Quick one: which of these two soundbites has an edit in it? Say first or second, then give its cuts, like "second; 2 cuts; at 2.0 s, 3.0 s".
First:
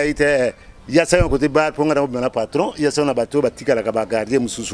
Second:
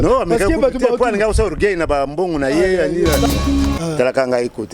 second; 1 cut; at 3.2 s